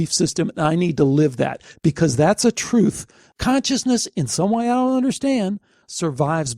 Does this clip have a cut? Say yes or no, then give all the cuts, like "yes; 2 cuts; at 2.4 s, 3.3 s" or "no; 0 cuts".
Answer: yes; 1 cut; at 3.2 s